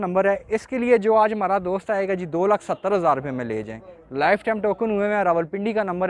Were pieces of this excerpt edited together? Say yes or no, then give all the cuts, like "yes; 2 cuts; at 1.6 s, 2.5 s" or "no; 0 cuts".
no; 0 cuts